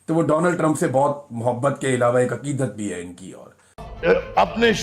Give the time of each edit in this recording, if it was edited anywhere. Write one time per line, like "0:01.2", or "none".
0:03.8